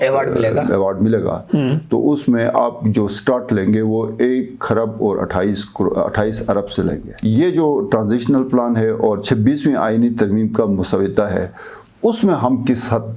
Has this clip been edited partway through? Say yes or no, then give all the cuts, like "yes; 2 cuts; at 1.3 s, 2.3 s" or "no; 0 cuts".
yes; 1 cut; at 7.1 s